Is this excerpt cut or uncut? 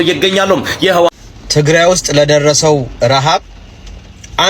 cut